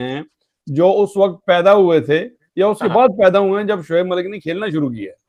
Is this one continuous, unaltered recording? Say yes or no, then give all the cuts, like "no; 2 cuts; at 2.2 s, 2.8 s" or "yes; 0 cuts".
yes; 0 cuts